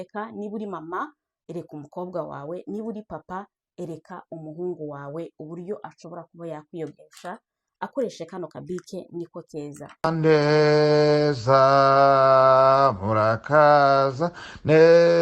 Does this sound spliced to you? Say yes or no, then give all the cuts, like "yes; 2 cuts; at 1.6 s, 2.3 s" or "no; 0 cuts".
yes; 1 cut; at 9.9 s